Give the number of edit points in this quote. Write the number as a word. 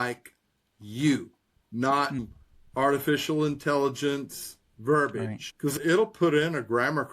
two